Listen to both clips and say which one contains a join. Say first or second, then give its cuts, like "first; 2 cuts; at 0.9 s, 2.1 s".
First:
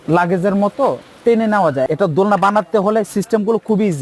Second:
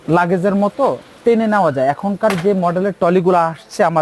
first; 1 cut; at 1.9 s